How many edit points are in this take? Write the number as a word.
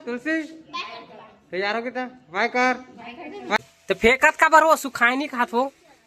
one